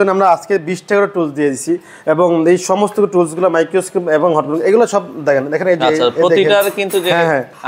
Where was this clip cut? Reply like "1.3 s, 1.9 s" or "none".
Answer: none

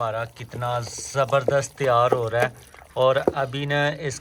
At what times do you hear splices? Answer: none

